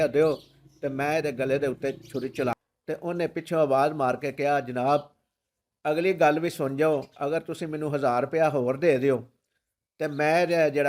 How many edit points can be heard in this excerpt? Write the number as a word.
one